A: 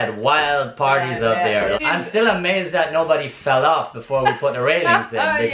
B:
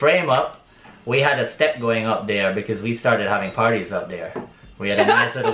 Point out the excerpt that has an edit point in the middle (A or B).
A